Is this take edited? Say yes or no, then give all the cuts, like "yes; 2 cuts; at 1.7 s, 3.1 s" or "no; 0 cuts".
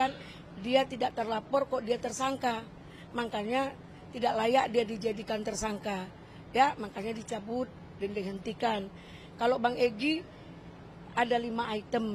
no; 0 cuts